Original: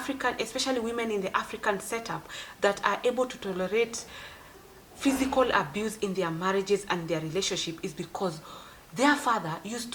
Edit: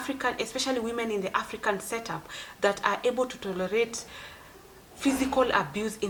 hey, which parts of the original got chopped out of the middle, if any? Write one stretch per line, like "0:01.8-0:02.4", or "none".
none

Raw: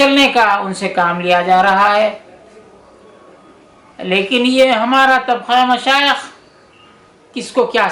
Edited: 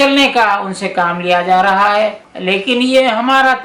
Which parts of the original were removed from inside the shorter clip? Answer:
0:02.3-0:03.9

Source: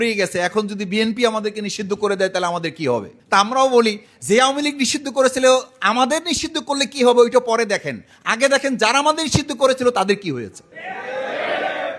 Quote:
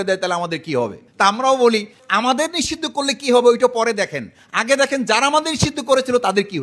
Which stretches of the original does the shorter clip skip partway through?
0:04.1-0:05.7

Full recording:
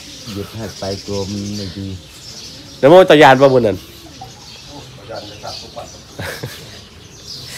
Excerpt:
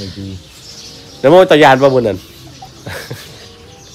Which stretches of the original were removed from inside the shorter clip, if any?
0:04.3-0:06.1

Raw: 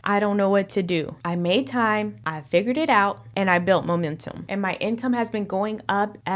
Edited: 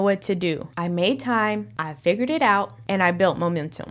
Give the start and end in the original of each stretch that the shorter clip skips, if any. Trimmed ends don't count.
none

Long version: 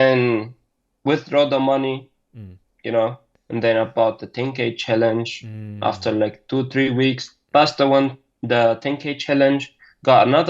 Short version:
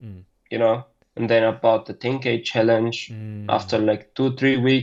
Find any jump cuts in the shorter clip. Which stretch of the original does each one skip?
none

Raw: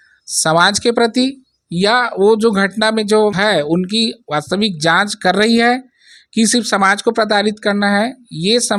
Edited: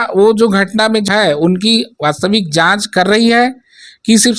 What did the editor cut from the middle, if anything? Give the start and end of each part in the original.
0:03.1-0:03.3

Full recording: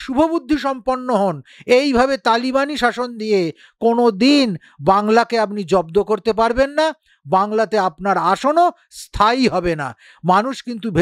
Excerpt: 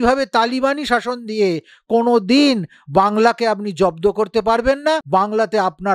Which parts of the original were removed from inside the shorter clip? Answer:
0:07.0-0:07.2

